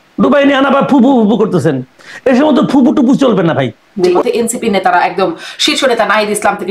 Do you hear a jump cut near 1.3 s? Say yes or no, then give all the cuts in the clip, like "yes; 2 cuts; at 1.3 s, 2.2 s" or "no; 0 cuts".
no; 1 cut; at 3.9 s